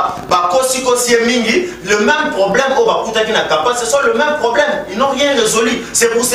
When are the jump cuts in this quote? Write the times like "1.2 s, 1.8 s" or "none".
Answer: none